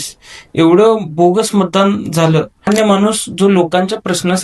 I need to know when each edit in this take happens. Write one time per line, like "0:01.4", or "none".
0:02.7